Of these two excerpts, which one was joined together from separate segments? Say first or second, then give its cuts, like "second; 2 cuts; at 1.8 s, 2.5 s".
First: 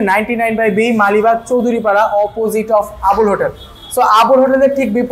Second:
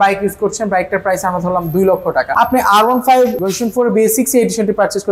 second; 2 cuts; at 2.3 s, 3.4 s